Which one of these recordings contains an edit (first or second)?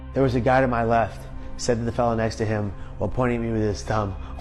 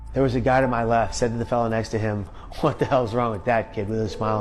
second